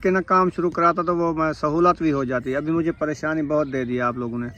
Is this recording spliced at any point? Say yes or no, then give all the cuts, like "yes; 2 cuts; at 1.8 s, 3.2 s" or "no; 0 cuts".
no; 0 cuts